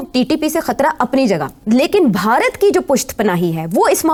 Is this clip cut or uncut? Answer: uncut